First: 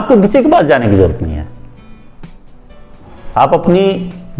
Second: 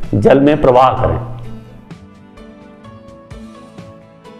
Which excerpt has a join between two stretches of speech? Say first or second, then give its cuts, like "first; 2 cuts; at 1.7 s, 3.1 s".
second; 1 cut; at 2.2 s